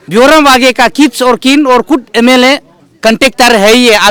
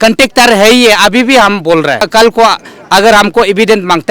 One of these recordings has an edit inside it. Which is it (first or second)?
second